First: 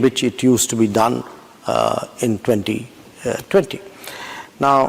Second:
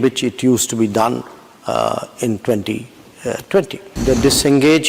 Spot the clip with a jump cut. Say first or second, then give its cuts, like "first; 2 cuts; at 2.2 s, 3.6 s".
second; 1 cut; at 3.8 s